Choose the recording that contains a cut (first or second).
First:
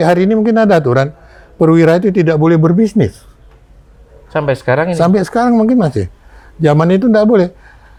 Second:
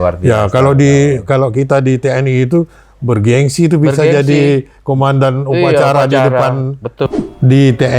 second